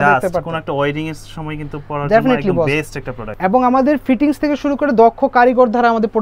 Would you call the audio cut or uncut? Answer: cut